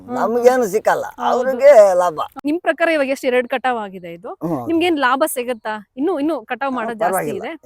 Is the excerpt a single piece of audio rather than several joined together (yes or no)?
no